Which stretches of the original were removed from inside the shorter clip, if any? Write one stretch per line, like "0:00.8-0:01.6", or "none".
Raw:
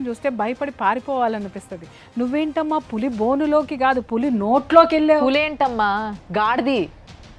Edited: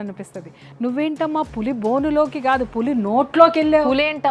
none